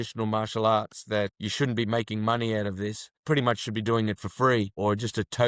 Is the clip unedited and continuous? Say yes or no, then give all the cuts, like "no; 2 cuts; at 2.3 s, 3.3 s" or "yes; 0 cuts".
no; 2 cuts; at 1.3 s, 3.2 s